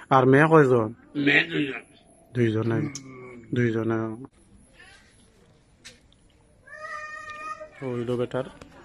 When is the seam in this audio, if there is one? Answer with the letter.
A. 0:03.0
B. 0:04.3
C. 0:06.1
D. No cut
B